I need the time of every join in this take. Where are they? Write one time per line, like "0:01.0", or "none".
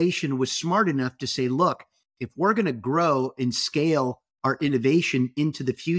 none